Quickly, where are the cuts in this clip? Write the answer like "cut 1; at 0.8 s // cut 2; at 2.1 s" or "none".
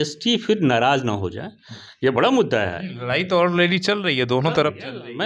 none